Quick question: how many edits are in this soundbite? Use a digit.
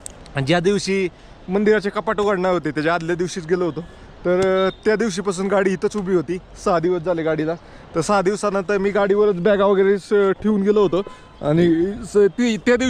0